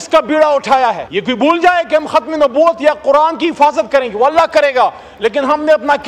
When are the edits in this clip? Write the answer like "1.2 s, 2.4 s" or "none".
1.1 s